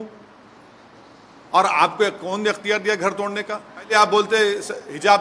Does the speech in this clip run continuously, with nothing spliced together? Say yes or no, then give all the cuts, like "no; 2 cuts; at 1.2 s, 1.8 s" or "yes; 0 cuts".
no; 1 cut; at 3.9 s